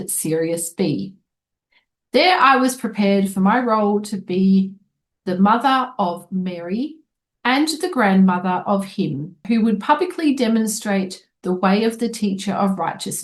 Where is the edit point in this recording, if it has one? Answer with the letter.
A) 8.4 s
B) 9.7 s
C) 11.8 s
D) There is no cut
B